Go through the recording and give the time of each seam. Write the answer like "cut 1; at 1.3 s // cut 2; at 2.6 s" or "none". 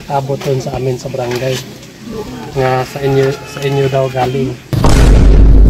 cut 1; at 1.8 s // cut 2; at 4.6 s